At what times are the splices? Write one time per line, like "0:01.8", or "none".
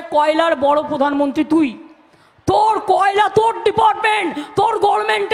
none